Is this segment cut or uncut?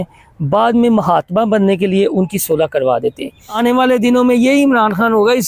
cut